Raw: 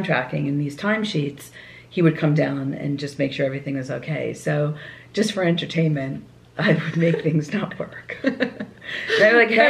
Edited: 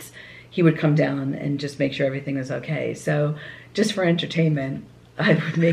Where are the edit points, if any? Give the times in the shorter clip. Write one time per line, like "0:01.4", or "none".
none